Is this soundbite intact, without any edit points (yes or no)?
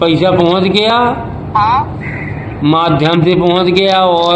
yes